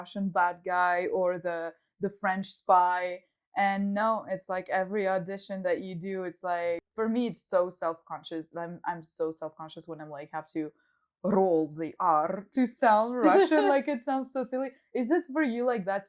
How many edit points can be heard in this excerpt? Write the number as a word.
one